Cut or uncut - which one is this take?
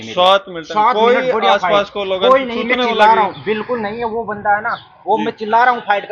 uncut